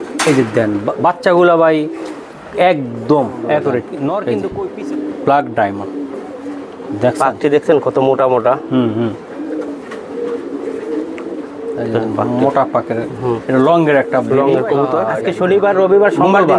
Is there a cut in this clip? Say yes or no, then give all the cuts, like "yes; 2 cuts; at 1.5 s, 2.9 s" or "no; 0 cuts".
yes; 2 cuts; at 4.4 s, 15.1 s